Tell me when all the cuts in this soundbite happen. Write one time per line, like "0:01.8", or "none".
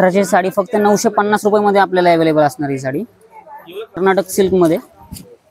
0:04.0